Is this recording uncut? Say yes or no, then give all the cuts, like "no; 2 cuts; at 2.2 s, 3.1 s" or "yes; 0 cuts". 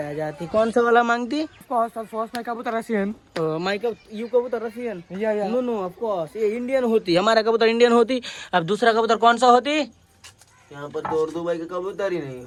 yes; 0 cuts